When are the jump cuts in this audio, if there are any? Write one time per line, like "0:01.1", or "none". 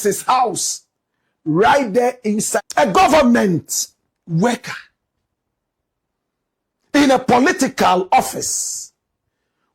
0:02.6